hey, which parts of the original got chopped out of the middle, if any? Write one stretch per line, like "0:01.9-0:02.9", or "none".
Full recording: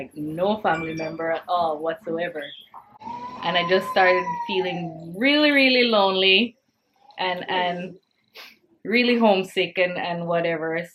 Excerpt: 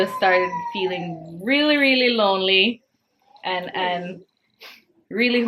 none